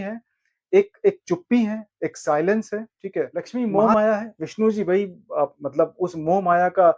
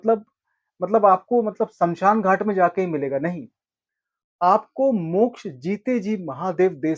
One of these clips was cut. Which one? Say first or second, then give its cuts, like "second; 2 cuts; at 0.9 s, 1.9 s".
first; 1 cut; at 3.5 s